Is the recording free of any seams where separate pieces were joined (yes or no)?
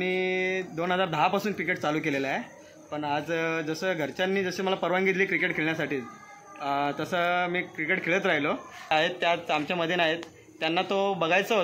no